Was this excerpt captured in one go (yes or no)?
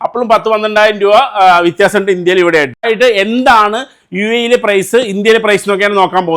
no